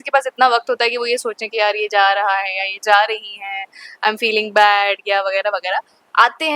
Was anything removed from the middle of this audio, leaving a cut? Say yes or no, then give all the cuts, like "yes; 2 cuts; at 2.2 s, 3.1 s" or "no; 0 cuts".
no; 0 cuts